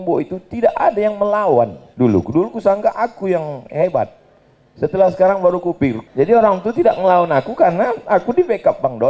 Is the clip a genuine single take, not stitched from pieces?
no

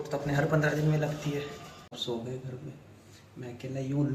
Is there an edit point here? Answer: yes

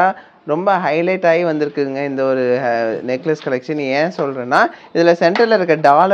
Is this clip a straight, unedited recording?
yes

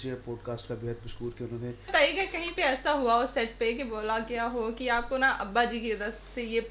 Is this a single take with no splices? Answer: no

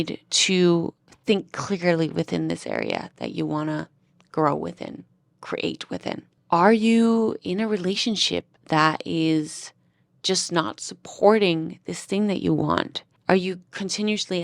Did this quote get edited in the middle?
no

